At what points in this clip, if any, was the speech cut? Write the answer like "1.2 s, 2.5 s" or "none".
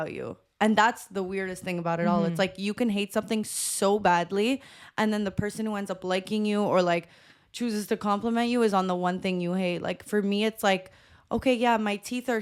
none